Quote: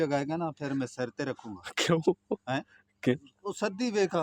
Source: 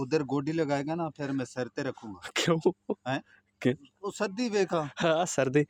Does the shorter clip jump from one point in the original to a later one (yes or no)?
no